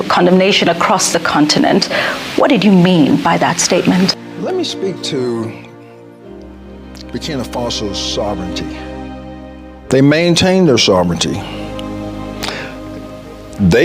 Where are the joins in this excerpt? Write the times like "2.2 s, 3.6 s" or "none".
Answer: 5.7 s, 7.1 s